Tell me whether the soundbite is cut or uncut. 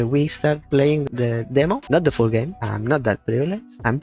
cut